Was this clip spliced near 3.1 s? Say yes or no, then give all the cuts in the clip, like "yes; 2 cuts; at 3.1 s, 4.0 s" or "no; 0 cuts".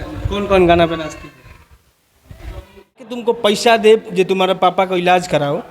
yes; 1 cut; at 3.1 s